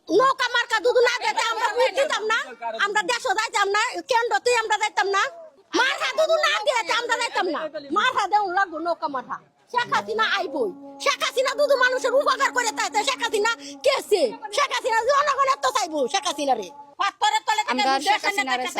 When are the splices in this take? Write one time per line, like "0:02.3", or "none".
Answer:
0:16.9

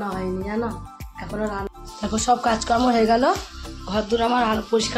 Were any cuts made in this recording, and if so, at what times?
0:01.7

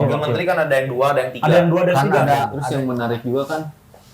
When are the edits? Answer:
0:02.6

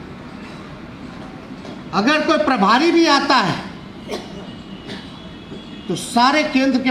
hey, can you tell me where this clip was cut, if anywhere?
none

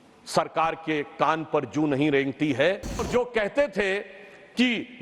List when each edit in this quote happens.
0:03.0

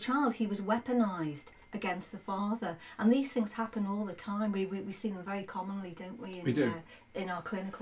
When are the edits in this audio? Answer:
none

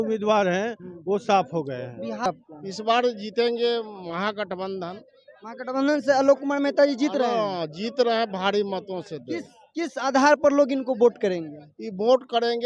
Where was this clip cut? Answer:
0:02.3

